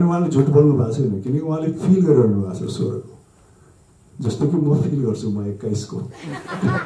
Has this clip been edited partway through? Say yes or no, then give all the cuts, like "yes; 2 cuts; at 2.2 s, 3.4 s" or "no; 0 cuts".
no; 0 cuts